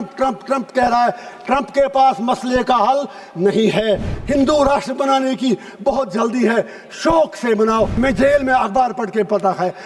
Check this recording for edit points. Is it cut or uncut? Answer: cut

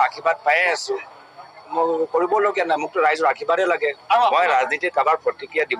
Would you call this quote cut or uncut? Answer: uncut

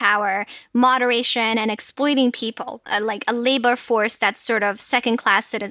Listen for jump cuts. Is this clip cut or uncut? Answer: uncut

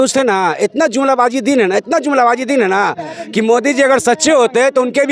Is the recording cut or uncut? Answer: uncut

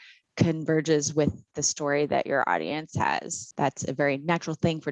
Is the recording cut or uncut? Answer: cut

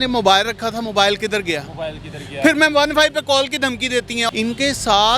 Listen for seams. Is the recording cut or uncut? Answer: cut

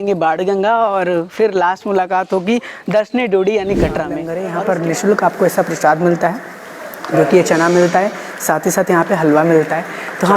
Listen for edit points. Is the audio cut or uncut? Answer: cut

